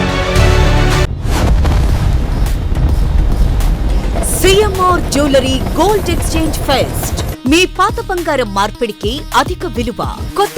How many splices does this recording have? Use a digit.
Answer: 1